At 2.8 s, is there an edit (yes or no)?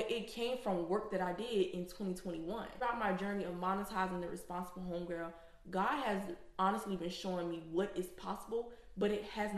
yes